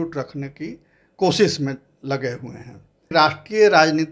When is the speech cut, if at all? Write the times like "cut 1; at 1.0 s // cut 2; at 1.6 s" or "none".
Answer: cut 1; at 3.1 s